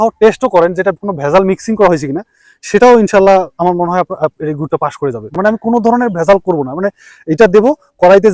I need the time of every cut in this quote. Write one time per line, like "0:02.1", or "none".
0:05.3